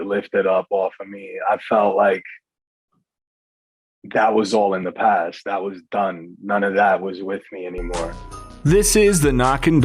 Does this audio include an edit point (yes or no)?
yes